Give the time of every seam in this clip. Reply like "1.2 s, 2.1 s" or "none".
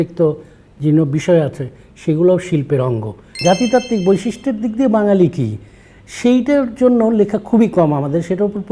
3.3 s